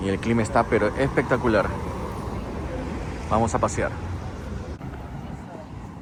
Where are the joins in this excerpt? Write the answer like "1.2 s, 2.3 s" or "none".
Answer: none

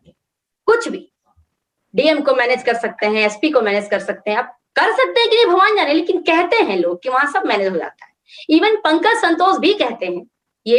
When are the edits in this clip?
none

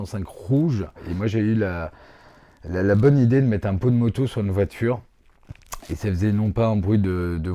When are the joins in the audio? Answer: 1.1 s

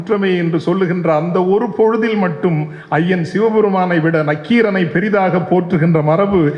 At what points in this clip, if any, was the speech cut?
none

